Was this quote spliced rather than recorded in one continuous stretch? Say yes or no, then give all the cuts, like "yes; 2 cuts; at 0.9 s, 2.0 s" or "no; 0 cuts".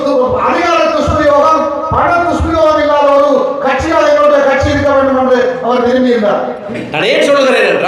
yes; 1 cut; at 6.6 s